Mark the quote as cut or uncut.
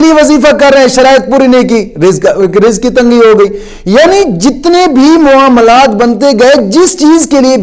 uncut